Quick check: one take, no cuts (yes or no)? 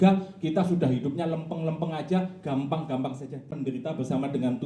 no